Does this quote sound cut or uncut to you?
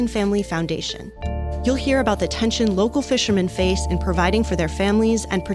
uncut